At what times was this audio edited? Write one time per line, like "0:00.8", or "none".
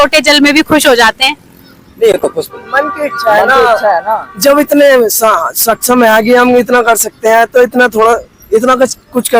none